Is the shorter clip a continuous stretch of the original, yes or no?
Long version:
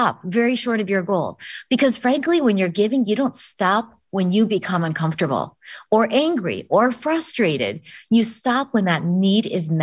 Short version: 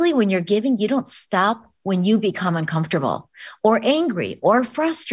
yes